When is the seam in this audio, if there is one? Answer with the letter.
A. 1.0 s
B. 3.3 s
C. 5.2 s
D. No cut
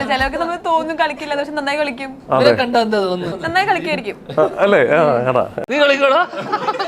B